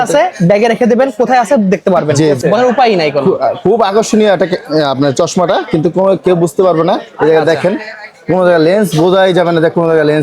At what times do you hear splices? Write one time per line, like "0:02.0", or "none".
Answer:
0:02.4